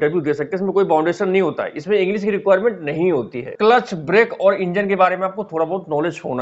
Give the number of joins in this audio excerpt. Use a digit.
1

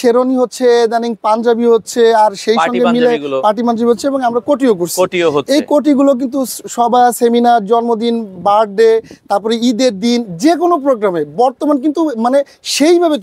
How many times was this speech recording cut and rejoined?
0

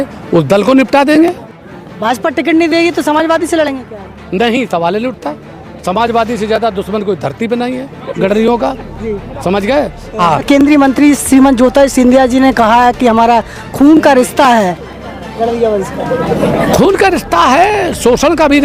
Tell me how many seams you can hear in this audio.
2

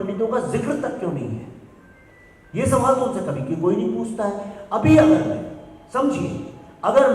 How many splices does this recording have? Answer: 0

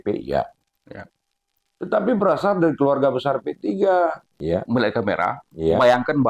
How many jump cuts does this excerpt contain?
1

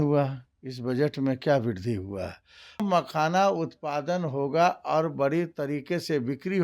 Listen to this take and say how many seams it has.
1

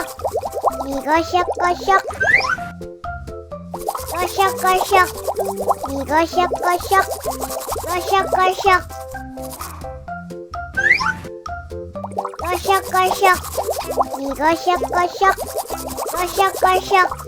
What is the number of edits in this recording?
1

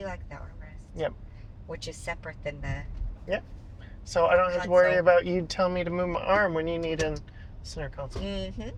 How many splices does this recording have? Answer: 0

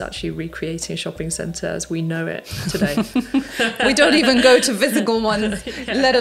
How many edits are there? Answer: 0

